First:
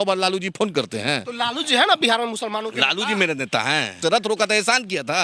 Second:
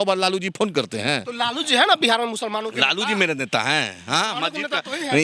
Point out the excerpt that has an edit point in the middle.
first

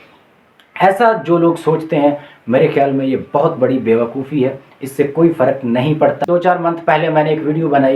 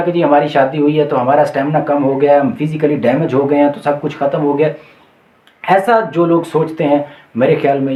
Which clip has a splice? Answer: first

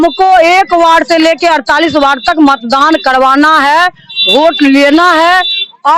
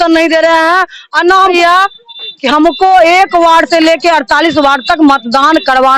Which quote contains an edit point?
second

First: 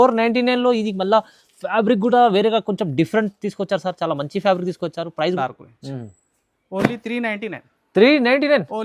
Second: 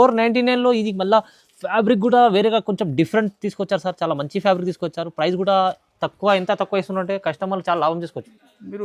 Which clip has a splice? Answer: first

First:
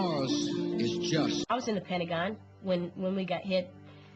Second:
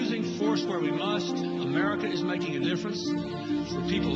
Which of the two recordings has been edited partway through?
second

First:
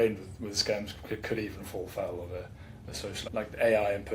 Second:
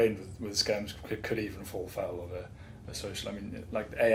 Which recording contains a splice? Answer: first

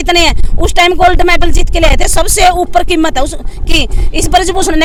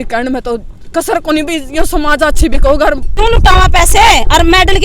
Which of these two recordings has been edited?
second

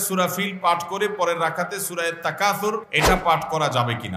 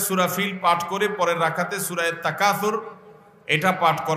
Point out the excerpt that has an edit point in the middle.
first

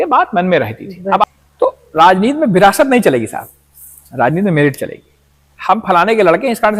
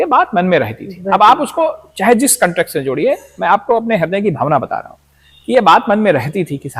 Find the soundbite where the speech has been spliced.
first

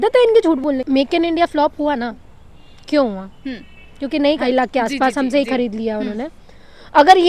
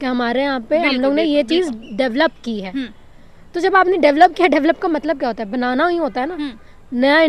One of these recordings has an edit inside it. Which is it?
first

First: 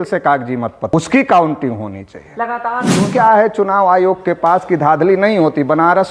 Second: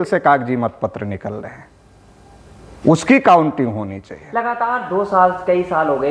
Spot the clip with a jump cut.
first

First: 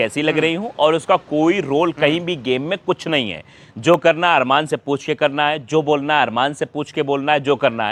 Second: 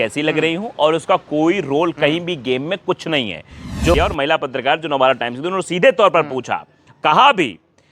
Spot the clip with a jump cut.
second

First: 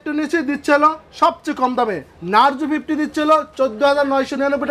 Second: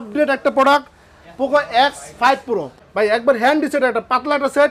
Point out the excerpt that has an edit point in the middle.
second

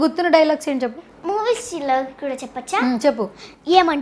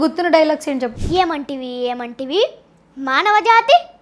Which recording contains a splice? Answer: second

